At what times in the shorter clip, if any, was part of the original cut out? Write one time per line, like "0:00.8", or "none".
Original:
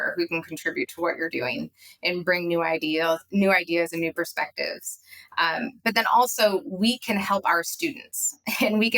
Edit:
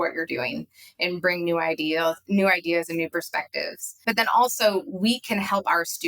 0:04.0